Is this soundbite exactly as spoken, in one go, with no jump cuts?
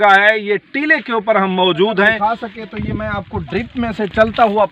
no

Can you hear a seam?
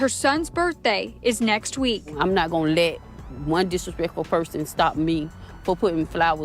no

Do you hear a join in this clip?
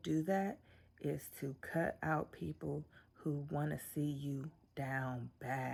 no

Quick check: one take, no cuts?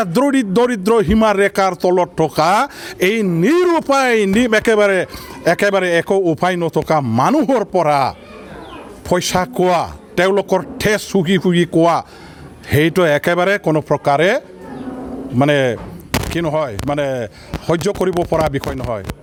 yes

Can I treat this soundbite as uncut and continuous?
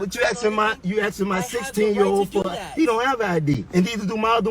no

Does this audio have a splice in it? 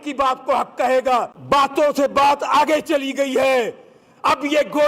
yes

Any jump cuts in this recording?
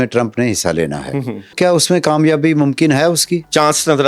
yes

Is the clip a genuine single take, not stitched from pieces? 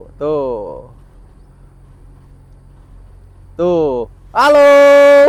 yes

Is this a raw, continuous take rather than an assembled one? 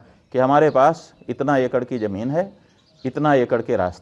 yes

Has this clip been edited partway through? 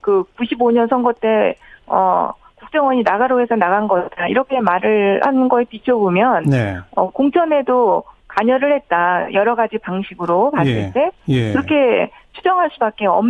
yes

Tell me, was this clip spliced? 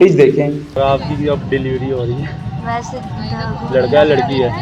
no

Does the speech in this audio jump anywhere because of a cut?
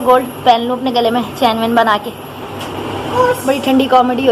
no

